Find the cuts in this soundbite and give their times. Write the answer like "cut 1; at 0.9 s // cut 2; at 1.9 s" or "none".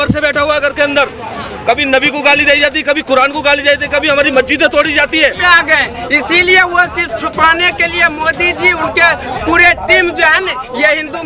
cut 1; at 5.4 s